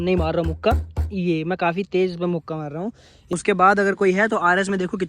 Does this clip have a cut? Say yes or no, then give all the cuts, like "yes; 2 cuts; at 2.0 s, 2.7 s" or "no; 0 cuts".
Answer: yes; 1 cut; at 3.3 s